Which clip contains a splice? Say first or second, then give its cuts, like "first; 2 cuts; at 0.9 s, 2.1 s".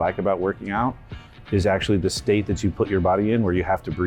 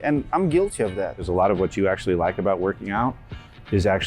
second; 1 cut; at 1.3 s